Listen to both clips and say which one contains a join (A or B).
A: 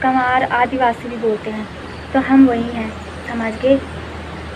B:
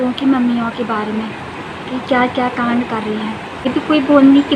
B